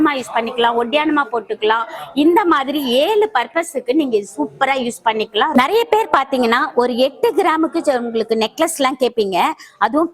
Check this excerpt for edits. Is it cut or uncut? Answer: cut